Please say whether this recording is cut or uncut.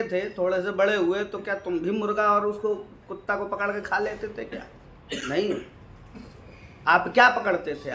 uncut